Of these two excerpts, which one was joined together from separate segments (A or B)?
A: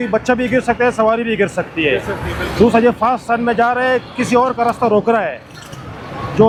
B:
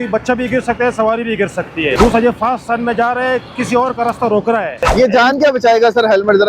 B